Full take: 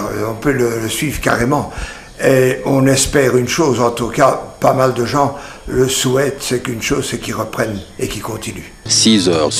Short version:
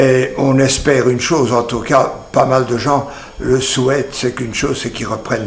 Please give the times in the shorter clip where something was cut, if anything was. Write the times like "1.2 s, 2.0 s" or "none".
none